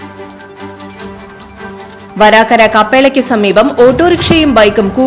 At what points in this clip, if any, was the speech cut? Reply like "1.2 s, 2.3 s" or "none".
1.0 s